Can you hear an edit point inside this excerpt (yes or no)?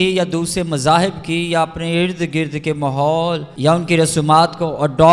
yes